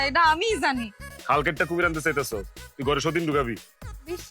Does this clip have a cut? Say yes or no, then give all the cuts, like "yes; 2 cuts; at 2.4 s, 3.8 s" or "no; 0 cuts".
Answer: yes; 1 cut; at 1.1 s